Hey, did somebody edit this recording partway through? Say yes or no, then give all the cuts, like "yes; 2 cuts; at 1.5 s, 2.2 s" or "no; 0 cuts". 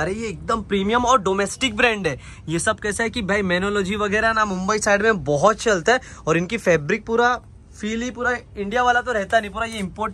no; 0 cuts